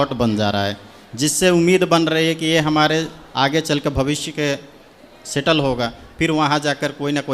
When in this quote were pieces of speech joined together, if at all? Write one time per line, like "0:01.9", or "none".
none